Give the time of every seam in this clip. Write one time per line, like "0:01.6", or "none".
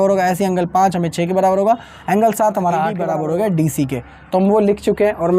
0:03.0

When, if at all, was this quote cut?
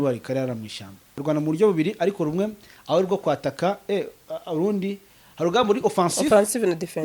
0:01.1

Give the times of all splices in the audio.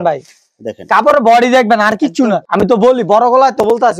0:02.4

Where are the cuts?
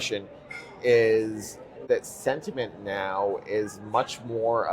0:01.8

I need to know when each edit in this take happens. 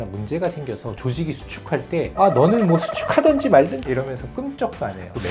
0:03.9

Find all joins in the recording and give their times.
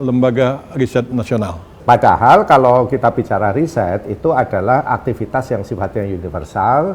0:01.7

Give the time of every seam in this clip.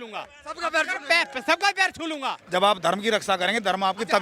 0:02.4

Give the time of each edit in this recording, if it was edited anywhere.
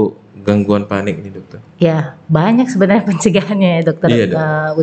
none

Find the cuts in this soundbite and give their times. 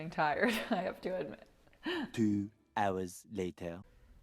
0:02.1

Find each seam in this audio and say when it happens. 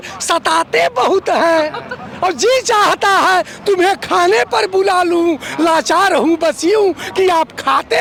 none

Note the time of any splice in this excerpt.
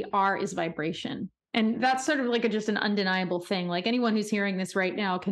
0:01.4

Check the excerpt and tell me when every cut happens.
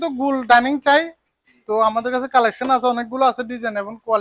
none

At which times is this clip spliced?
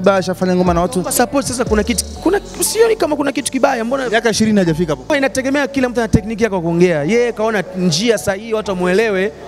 0:05.1

